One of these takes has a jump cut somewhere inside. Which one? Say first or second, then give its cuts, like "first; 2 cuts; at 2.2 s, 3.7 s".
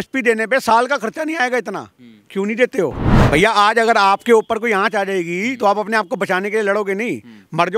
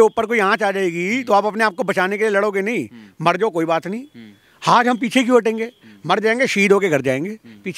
first; 1 cut; at 3.1 s